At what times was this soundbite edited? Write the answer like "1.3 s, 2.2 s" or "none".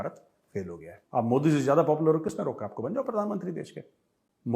0.9 s